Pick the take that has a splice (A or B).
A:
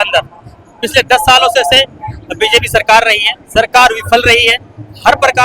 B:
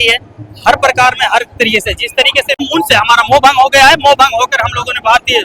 B